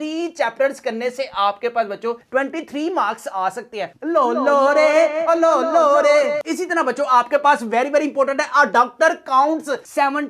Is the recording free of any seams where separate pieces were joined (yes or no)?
no